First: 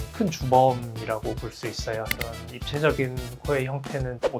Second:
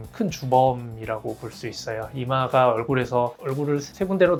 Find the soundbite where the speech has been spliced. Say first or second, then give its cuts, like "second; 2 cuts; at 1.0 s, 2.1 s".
first; 1 cut; at 2.1 s